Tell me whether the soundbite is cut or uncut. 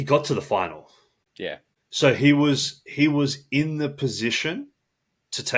cut